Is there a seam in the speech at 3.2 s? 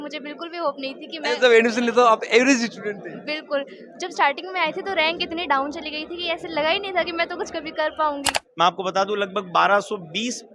no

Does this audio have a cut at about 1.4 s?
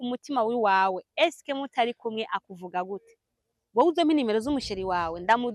no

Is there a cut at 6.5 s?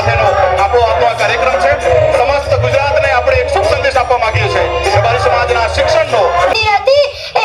yes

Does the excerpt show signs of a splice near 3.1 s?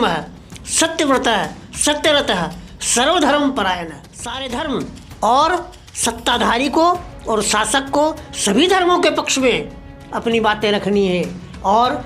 no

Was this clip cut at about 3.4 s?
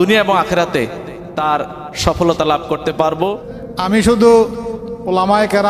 yes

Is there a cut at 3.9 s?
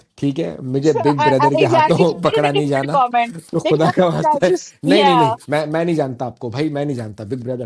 no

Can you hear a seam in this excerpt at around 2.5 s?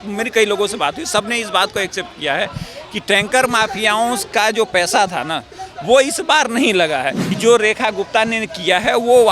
no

